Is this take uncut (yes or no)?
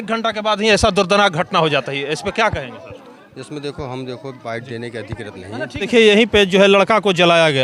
no